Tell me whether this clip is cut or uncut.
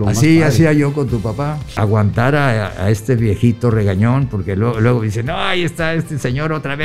cut